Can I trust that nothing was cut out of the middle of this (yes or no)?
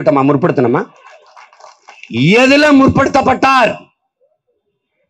yes